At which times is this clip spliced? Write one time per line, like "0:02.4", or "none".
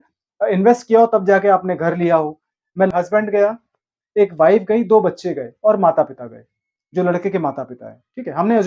0:02.9